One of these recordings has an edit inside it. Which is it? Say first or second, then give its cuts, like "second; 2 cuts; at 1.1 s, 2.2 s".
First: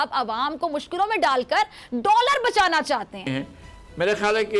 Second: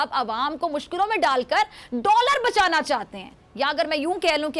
first; 1 cut; at 3.3 s